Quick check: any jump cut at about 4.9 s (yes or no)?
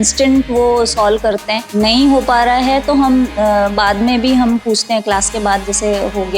no